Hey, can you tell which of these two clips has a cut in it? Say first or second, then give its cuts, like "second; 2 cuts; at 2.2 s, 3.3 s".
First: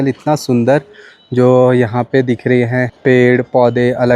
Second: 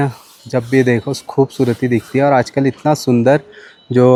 first; 1 cut; at 2.9 s